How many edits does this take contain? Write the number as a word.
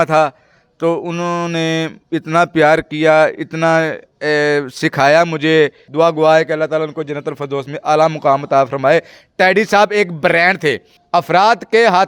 two